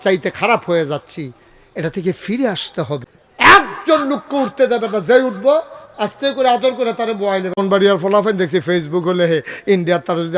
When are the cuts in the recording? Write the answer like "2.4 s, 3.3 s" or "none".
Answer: 3.2 s, 7.6 s